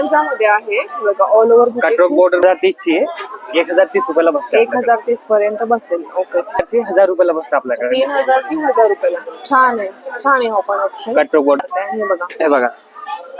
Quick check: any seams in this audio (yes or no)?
yes